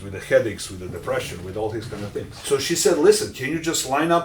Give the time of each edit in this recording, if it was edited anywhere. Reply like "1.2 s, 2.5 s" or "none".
2.3 s